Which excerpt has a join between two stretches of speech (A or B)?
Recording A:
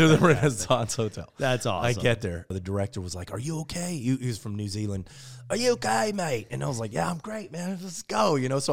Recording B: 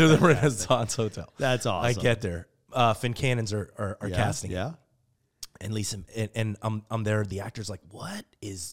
A